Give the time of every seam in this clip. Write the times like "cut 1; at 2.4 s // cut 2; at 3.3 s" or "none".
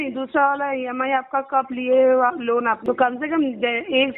cut 1; at 2.8 s